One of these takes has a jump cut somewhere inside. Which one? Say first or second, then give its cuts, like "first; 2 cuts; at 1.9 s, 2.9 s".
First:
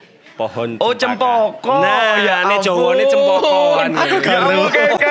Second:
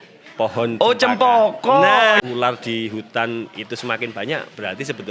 second; 1 cut; at 2.2 s